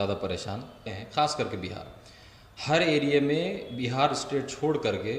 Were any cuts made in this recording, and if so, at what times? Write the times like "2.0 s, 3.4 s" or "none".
0.9 s